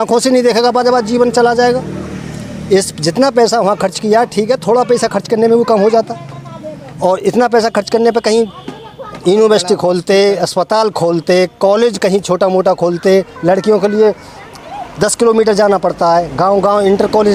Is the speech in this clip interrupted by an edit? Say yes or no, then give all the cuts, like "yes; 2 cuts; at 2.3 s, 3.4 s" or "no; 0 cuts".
no; 0 cuts